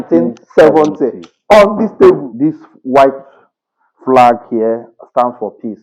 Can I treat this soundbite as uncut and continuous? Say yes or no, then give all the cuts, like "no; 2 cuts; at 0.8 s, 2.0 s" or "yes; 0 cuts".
no; 1 cut; at 2.3 s